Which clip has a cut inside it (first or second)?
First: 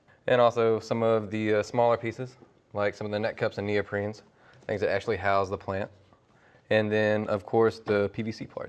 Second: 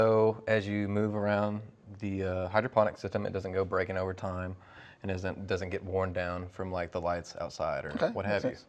second